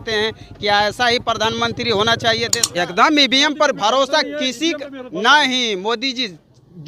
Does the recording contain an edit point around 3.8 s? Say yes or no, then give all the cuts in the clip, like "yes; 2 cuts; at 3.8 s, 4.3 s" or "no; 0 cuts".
no; 1 cut; at 2.6 s